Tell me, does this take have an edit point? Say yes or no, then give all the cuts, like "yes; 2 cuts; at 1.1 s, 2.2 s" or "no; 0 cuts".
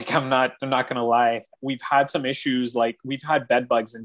yes; 1 cut; at 1.5 s